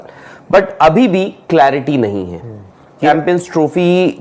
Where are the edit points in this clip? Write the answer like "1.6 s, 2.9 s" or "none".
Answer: 3.1 s